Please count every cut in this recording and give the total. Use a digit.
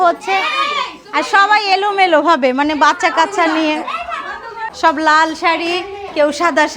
1